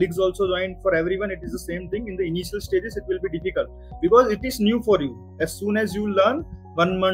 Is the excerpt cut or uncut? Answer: uncut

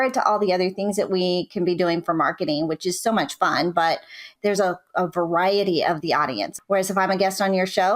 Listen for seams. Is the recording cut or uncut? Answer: cut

